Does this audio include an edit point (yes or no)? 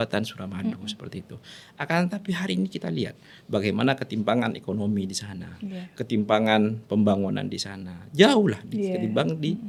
no